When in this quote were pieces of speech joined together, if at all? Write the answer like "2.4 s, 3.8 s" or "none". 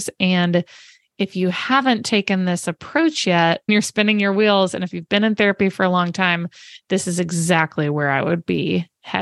3.7 s